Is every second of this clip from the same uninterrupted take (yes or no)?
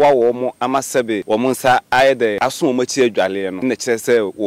no